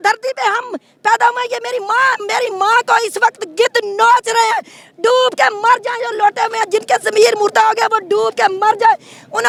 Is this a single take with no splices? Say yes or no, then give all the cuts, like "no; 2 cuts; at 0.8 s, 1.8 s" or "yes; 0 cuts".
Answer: yes; 0 cuts